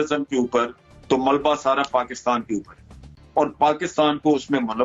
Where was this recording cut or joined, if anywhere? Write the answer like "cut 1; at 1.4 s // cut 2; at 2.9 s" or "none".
none